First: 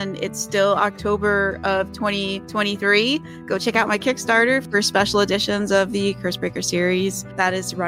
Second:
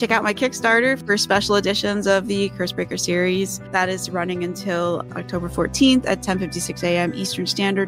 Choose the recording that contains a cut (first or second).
first